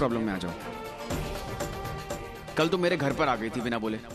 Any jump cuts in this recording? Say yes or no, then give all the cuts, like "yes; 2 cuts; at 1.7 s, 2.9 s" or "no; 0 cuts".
no; 0 cuts